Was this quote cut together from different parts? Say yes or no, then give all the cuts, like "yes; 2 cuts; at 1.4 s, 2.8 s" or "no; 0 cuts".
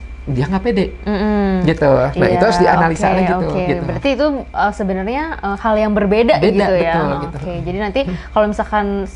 no; 0 cuts